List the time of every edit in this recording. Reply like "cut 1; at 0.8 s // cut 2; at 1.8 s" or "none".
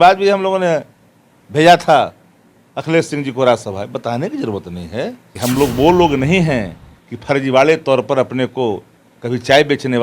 cut 1; at 5.2 s